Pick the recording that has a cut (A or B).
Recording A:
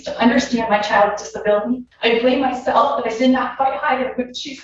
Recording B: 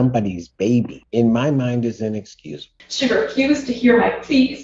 B